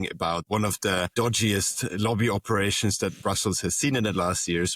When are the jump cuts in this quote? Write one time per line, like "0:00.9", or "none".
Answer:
0:01.1